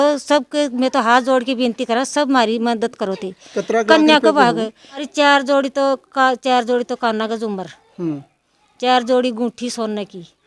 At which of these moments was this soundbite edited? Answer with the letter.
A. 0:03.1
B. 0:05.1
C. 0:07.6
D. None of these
B